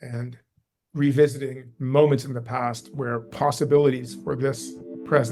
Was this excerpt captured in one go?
yes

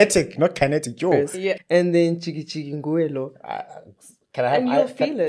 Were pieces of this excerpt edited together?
yes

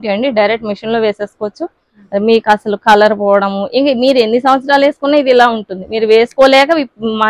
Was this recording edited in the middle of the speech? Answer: no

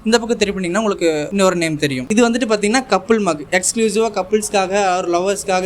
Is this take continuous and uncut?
no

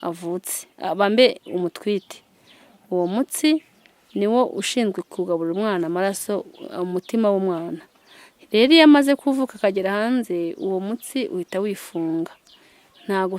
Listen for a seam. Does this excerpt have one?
no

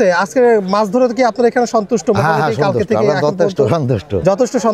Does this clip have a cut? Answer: no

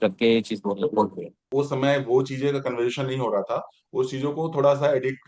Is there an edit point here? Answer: yes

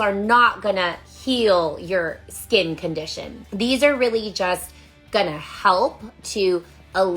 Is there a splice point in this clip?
no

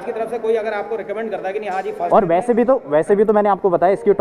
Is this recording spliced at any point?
no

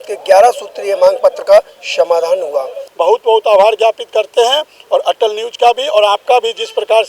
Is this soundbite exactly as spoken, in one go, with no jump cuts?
no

